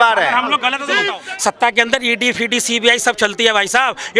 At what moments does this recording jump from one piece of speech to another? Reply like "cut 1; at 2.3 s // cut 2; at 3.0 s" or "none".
cut 1; at 1.1 s